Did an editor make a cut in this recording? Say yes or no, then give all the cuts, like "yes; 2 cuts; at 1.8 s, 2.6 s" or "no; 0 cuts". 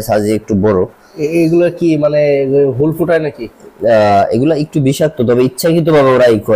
no; 0 cuts